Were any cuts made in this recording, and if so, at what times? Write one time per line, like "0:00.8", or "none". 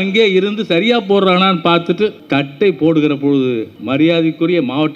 0:02.2
0:03.7